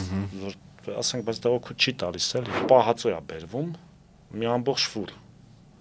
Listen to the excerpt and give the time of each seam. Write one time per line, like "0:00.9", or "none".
0:02.6